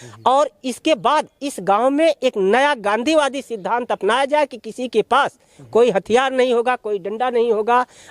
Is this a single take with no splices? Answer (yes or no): yes